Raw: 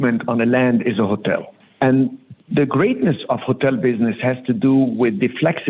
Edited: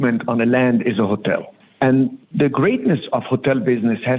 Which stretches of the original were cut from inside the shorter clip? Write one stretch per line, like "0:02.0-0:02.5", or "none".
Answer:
0:02.2-0:02.4